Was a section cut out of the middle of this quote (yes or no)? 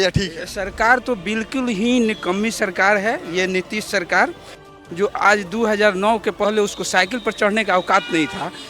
yes